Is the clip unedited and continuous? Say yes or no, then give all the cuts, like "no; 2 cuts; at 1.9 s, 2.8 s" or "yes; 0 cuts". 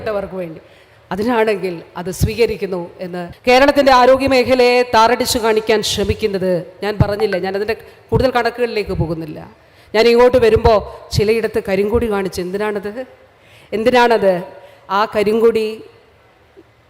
no; 1 cut; at 3.2 s